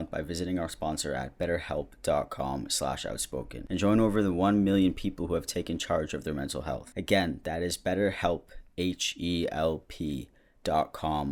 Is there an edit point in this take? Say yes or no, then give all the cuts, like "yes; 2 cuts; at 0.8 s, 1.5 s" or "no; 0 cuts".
no; 0 cuts